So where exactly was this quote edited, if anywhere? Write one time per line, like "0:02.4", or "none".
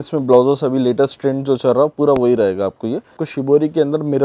0:03.2

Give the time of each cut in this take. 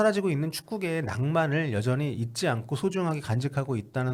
none

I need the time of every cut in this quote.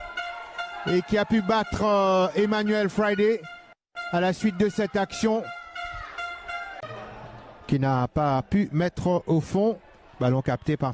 0:06.9

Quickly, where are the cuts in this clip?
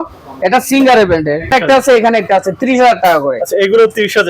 0:01.5

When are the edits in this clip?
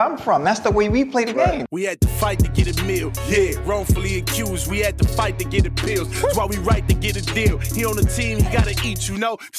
0:01.8

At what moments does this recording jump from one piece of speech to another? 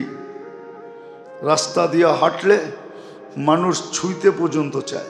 none

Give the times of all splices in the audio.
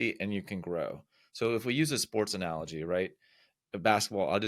none

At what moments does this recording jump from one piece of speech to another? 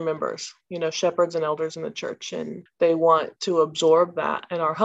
0:02.6
0:03.3

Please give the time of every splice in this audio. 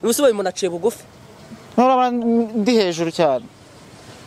none

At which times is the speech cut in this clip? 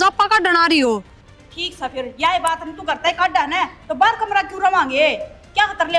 0:01.2

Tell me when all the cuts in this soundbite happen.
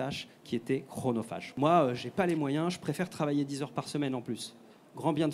0:01.4

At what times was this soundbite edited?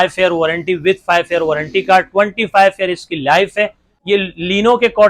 0:03.9

